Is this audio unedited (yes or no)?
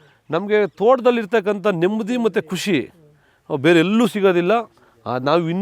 yes